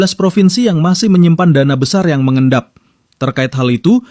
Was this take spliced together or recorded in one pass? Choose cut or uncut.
uncut